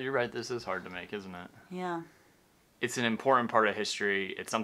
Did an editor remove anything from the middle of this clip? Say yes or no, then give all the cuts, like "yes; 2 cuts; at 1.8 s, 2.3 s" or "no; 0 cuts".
yes; 1 cut; at 2.6 s